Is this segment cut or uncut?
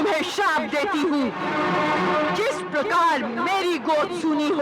cut